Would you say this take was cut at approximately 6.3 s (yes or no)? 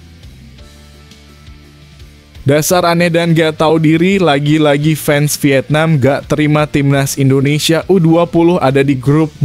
no